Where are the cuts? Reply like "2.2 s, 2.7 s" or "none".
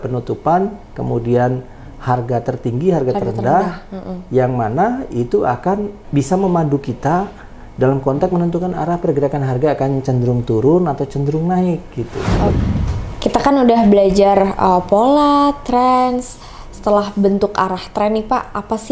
12.5 s